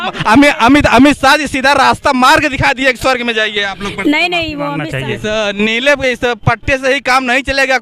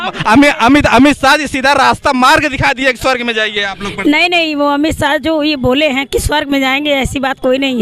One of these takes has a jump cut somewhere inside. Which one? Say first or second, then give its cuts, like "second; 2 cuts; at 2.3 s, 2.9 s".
first; 1 cut; at 4.8 s